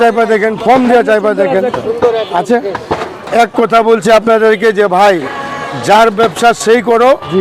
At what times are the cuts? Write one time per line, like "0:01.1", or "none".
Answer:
0:03.2

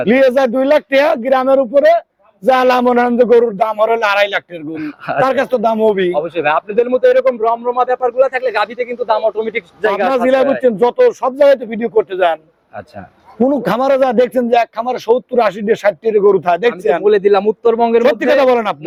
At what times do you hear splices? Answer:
none

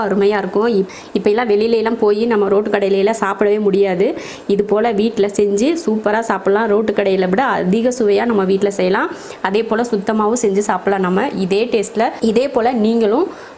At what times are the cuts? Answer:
0:12.2

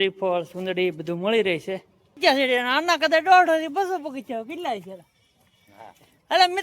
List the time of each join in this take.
0:02.2

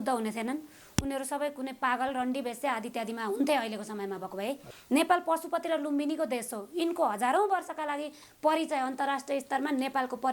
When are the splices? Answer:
0:04.7

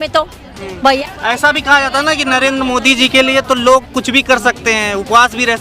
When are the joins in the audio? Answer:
0:01.0

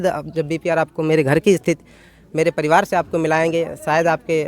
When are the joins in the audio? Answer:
none

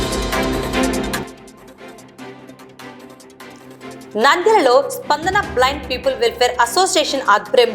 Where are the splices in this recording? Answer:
0:01.1
0:03.1
0:04.1

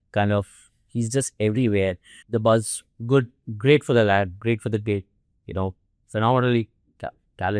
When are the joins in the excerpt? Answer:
0:02.1

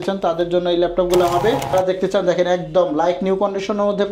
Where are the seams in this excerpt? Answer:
0:01.7

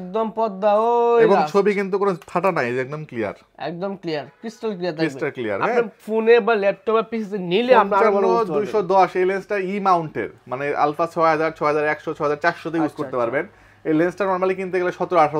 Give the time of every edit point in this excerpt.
none

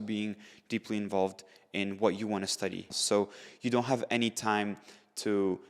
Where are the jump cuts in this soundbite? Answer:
0:02.9

